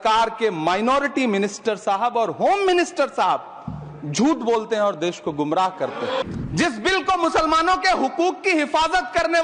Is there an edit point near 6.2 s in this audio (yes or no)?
yes